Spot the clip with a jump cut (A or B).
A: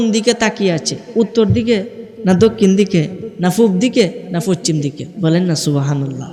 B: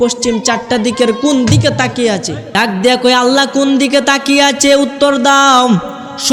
B